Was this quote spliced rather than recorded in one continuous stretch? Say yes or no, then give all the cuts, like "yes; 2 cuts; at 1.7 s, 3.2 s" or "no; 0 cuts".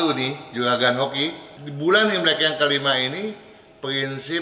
no; 0 cuts